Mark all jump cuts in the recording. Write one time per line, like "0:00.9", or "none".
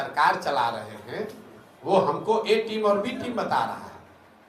none